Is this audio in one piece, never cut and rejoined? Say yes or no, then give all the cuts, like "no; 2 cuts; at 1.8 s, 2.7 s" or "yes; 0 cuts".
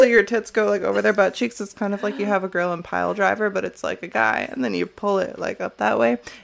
yes; 0 cuts